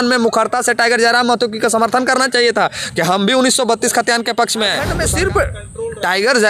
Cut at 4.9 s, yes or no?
yes